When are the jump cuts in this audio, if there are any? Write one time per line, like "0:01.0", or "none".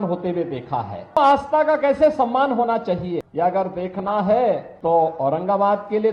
0:01.2
0:03.3
0:04.7